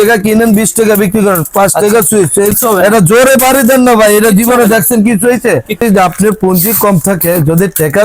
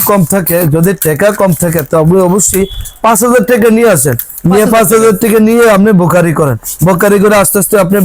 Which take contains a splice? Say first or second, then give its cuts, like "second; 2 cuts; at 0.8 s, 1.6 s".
first; 2 cuts; at 2.5 s, 5.8 s